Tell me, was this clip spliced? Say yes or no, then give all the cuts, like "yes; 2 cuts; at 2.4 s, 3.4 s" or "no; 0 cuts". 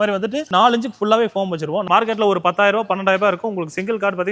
yes; 1 cut; at 1.8 s